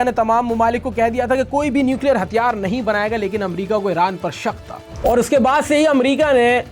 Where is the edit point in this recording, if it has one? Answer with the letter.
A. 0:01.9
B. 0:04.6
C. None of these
C